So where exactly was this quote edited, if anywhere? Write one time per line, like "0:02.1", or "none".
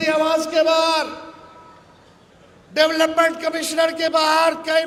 none